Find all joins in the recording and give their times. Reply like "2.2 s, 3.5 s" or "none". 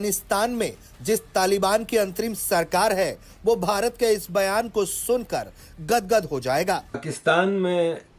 7.1 s